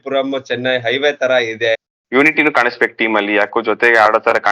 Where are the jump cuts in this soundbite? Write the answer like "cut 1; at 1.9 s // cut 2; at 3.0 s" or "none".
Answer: cut 1; at 1.8 s

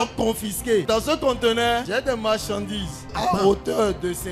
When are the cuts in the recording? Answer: cut 1; at 0.8 s // cut 2; at 1.9 s // cut 3; at 3.1 s

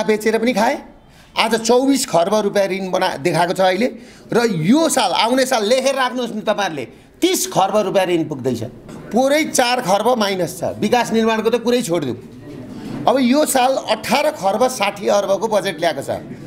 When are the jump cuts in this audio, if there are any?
cut 1; at 9.0 s

